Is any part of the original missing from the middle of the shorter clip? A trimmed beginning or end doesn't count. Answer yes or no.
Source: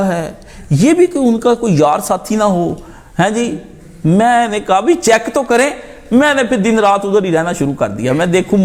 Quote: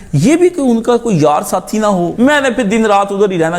yes